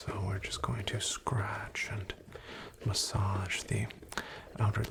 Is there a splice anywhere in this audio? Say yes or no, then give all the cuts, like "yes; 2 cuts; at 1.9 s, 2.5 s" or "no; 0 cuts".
no; 0 cuts